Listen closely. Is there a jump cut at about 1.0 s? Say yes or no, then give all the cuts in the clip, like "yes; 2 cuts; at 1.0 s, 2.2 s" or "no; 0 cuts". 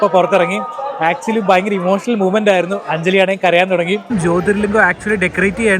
no; 1 cut; at 4.1 s